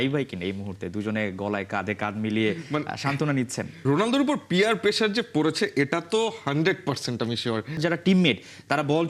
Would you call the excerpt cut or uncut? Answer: cut